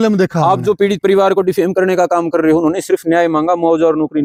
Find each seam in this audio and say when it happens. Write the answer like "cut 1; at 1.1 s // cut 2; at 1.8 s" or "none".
none